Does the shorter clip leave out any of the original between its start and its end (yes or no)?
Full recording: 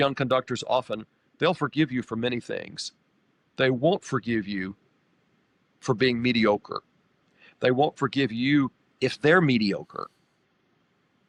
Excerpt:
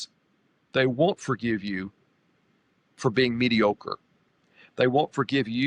no